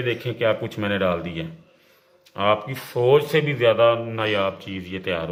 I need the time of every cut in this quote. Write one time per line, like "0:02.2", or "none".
none